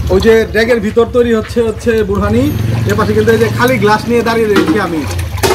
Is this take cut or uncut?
uncut